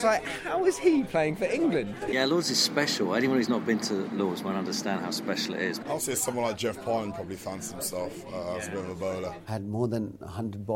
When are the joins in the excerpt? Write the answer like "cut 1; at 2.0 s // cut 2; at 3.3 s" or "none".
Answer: cut 1; at 2.0 s // cut 2; at 5.8 s // cut 3; at 9.4 s